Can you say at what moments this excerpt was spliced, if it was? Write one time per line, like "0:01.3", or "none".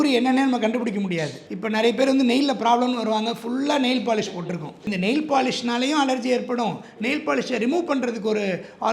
0:04.8